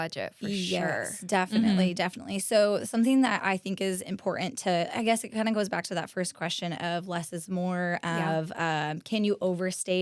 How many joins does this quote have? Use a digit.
0